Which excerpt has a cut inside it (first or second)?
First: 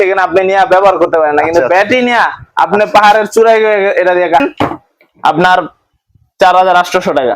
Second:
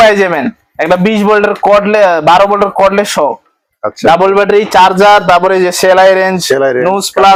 first